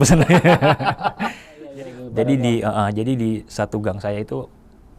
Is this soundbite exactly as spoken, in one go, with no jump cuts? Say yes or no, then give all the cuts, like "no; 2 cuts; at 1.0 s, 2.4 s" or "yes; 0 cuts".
no; 1 cut; at 1.7 s